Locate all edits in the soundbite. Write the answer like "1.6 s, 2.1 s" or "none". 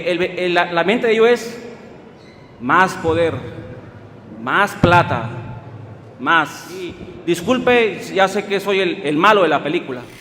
7.1 s